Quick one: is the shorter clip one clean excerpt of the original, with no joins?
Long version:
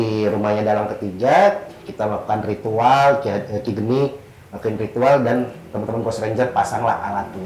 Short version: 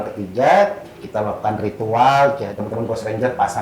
no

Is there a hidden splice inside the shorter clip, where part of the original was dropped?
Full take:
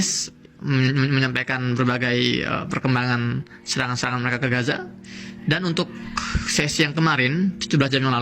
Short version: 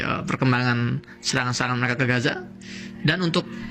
no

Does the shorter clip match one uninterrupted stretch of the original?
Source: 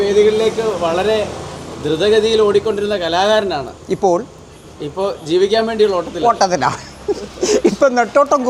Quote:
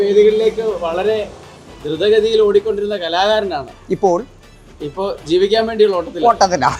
yes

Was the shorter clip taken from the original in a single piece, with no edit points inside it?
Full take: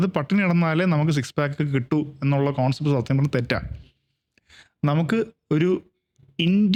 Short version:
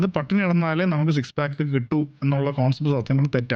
yes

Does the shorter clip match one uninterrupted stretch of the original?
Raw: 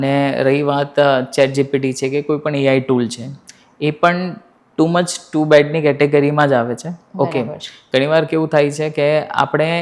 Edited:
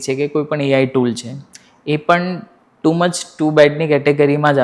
yes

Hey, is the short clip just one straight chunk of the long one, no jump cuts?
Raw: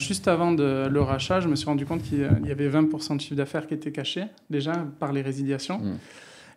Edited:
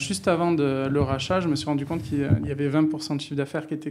yes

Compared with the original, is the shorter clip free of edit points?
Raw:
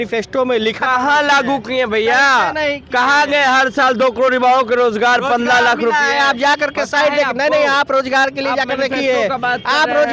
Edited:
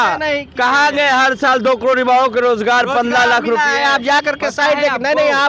yes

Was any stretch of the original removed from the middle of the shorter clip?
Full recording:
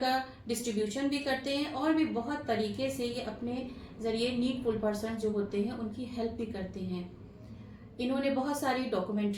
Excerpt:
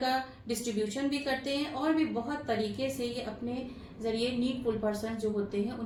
no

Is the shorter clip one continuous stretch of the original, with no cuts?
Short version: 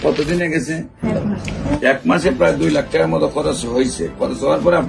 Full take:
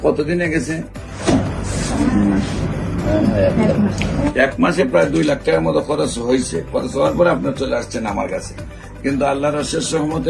no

